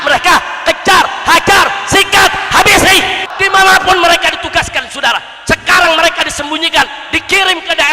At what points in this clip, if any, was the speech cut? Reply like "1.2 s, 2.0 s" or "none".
3.3 s